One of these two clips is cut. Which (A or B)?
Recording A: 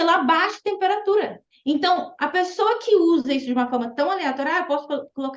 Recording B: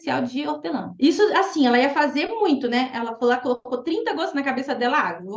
A